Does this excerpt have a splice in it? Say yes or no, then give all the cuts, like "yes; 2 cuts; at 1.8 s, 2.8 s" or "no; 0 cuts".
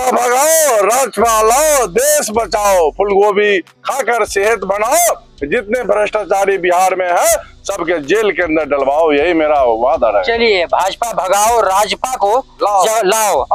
no; 0 cuts